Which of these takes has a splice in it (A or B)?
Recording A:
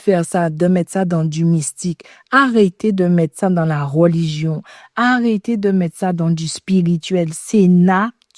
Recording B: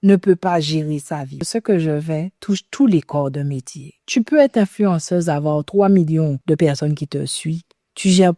B